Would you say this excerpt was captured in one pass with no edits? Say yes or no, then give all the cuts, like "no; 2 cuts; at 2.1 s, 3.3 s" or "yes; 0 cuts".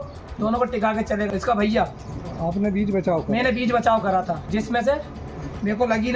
no; 1 cut; at 1.3 s